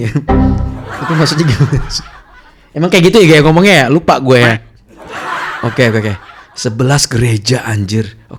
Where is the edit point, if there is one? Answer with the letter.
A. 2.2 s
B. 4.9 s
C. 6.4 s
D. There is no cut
D